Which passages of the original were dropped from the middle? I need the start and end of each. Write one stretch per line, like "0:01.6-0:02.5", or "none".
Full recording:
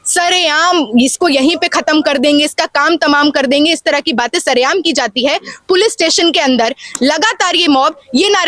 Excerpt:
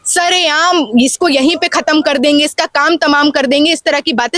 none

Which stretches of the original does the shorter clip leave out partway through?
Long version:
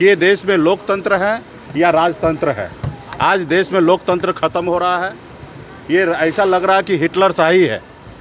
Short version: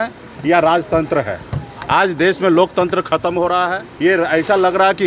0:05.2-0:05.7

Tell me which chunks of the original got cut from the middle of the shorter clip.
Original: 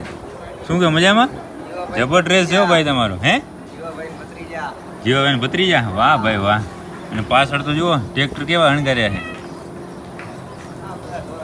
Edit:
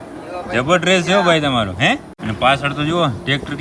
0:03.6-0:07.0

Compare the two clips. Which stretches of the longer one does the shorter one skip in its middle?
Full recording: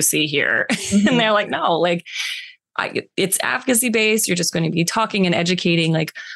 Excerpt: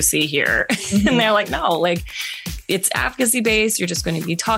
0:02.6-0:03.1

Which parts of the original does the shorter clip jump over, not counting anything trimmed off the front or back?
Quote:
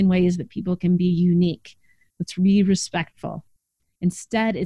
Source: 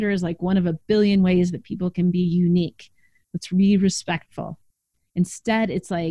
none

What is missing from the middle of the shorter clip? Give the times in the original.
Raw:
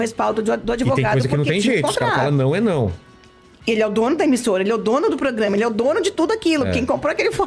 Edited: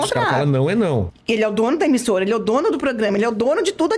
0:03.0-0:03.5

